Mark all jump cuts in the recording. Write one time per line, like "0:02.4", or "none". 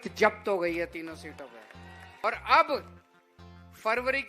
0:02.2

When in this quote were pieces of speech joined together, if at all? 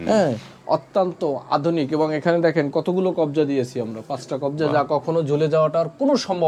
none

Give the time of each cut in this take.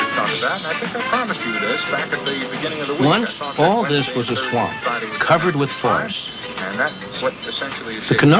0:03.2

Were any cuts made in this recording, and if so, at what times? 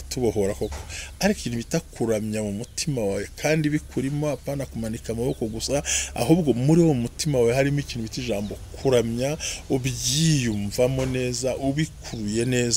none

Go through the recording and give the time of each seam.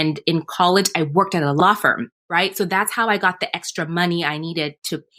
0:01.6

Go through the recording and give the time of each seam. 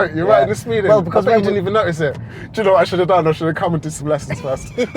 0:02.2

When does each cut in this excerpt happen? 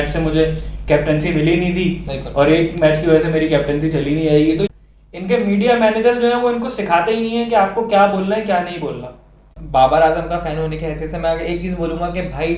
0:04.7
0:09.5

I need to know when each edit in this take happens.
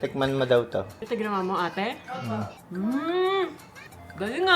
0:01.0
0:02.6

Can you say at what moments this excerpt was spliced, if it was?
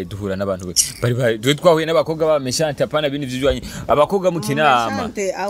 none

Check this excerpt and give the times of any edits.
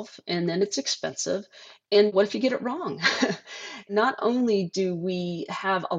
0:03.9

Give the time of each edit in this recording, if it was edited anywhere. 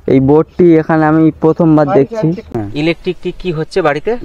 0:02.4

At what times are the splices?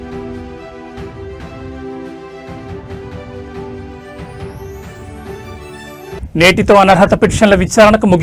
none

